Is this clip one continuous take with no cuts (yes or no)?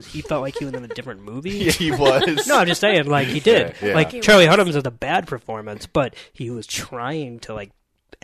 yes